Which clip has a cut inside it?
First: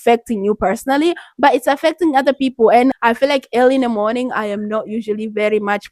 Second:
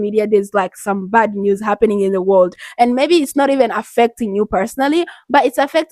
first; 1 cut; at 2.9 s

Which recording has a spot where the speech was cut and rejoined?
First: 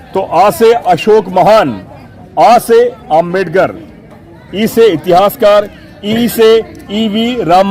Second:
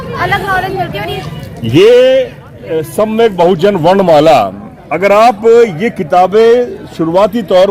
second; 1 cut; at 1.2 s

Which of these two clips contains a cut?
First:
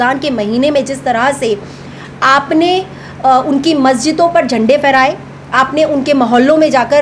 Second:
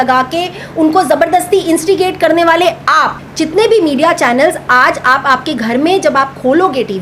second; 1 cut; at 3.2 s

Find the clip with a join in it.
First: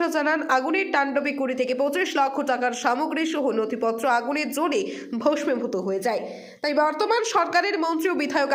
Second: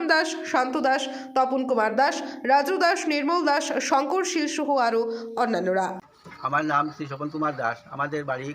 second; 1 cut; at 6.0 s

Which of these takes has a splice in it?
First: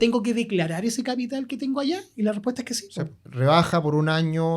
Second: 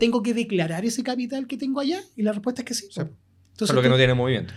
first; 1 cut; at 3.2 s

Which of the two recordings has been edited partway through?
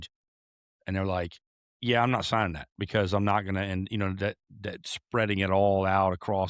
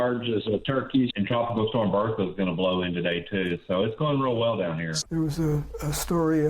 second; 2 cuts; at 1.1 s, 4.9 s

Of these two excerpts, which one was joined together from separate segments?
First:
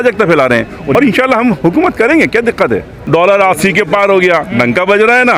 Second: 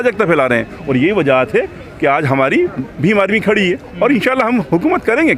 first; 2 cuts; at 0.9 s, 2.9 s

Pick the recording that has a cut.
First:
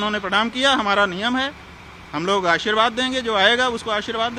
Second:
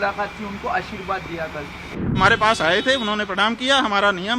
second; 1 cut; at 2.2 s

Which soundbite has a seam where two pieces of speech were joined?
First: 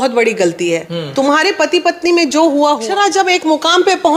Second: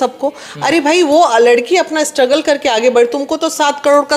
first; 1 cut; at 2.8 s

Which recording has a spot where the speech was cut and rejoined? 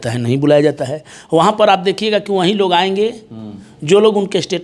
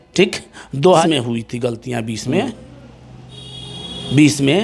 second; 1 cut; at 1.0 s

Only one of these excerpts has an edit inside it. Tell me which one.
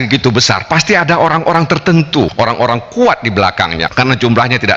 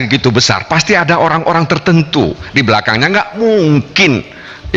first; 2 cuts; at 2.3 s, 3.8 s

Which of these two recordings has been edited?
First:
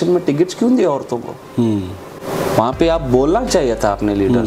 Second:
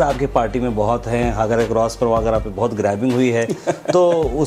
first; 1 cut; at 2.2 s

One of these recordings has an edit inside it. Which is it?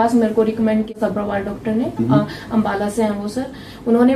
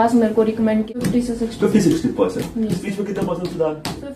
second; 1 cut; at 0.9 s

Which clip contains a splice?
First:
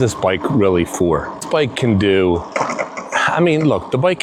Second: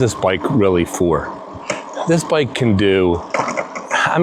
first; 1 cut; at 1.5 s

